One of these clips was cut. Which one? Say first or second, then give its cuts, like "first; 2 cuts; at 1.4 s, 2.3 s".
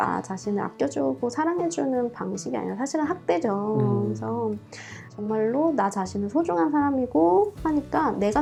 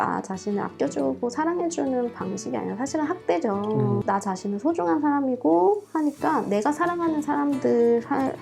second; 1 cut; at 4.0 s